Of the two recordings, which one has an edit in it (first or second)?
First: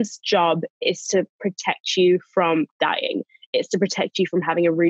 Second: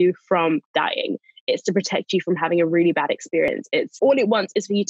second